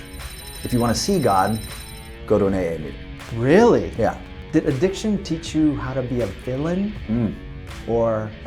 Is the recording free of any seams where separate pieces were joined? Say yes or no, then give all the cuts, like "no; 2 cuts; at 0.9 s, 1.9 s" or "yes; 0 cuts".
no; 1 cut; at 4.3 s